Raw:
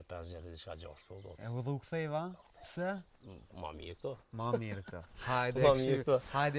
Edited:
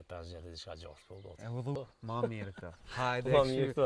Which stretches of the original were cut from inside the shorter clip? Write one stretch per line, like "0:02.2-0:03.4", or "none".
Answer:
0:01.8-0:04.1